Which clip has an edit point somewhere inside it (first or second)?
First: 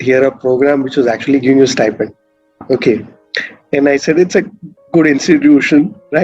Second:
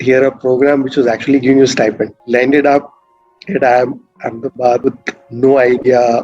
second